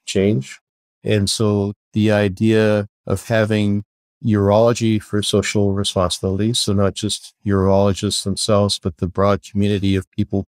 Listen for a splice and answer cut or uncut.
cut